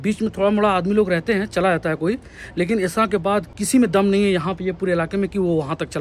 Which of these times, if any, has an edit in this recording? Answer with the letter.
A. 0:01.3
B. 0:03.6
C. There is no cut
B